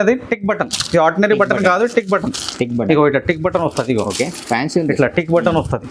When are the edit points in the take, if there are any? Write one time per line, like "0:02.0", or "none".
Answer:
none